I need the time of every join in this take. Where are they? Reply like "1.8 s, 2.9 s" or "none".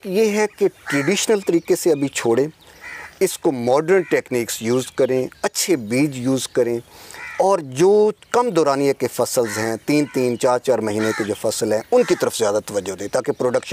none